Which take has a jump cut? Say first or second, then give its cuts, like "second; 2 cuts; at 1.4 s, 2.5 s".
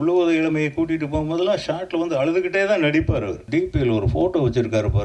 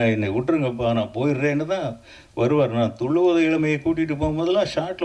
first; 1 cut; at 3.5 s